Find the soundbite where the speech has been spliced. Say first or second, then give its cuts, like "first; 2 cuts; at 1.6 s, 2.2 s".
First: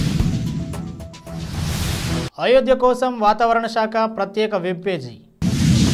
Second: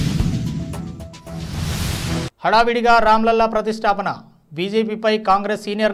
second; 1 cut; at 2.3 s